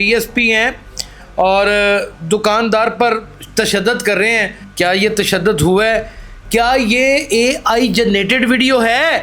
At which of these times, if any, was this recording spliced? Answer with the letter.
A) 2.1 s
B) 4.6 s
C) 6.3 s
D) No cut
B